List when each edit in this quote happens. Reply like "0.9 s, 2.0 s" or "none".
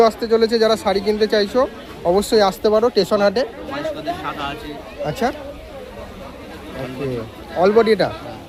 none